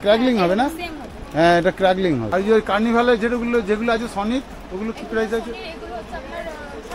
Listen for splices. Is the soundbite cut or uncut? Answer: cut